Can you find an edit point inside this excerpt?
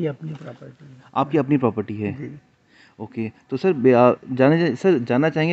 no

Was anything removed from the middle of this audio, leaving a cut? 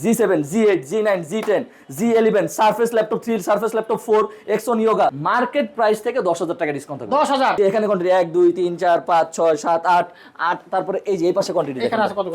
yes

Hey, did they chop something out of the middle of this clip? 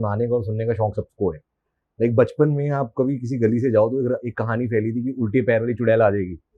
no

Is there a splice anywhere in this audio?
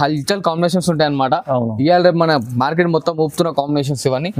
no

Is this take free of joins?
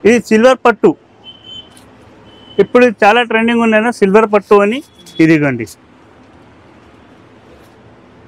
yes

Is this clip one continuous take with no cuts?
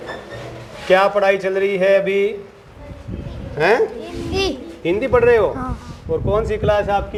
yes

